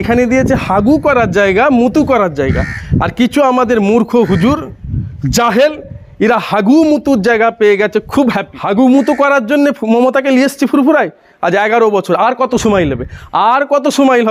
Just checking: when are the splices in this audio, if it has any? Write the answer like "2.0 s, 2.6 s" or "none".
8.5 s